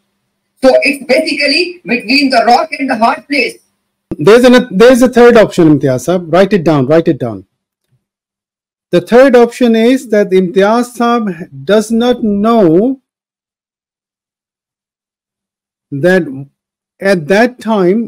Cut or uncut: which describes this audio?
cut